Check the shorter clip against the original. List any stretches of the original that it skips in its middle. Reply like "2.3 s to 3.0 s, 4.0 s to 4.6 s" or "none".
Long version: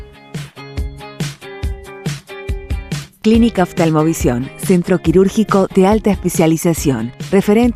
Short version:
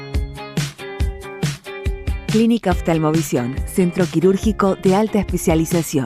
3.0 s to 3.2 s

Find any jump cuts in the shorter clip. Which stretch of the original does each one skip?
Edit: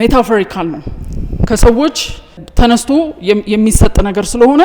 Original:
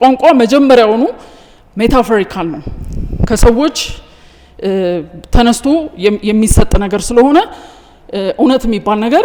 4.2 s to 5.2 s

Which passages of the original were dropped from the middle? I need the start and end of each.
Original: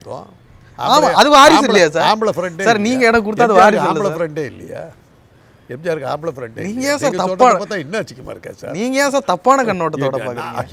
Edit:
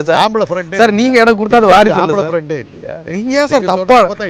4.9 s to 6.5 s

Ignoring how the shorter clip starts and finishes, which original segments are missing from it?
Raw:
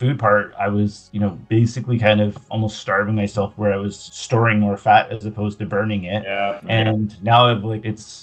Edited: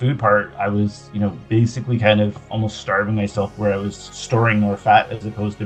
none

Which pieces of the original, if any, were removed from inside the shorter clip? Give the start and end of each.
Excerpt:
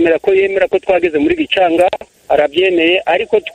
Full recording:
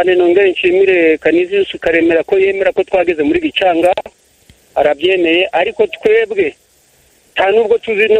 4.1 s to 4.6 s

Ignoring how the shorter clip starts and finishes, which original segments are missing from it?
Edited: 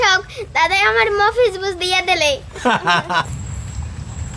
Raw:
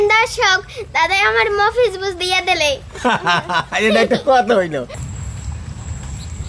3.7 s to 5.0 s

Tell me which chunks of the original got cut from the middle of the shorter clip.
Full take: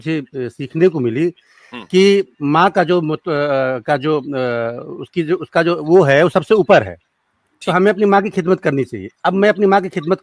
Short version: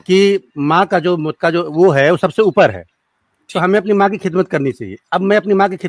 3.2 s to 5.5 s

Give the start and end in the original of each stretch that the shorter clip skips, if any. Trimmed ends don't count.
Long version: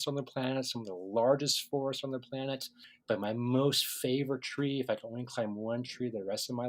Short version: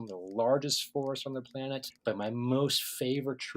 2.7 s to 2.9 s

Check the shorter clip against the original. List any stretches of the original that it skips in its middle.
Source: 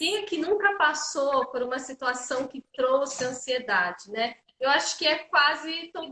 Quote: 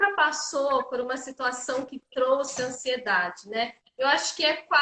none

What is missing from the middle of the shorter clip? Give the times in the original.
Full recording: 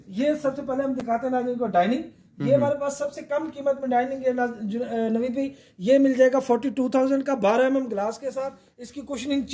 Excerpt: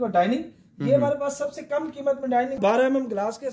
4.2 s to 7.4 s

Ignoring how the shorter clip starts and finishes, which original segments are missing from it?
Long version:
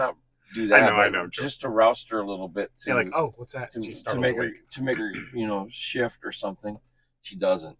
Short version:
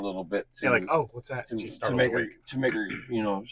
none

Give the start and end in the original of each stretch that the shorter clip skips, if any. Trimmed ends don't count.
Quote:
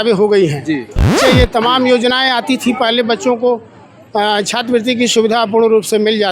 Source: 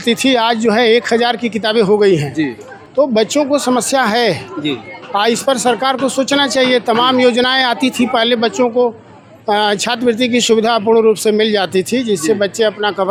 2.8 s to 6.5 s

